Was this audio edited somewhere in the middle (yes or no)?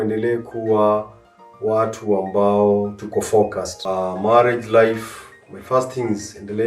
yes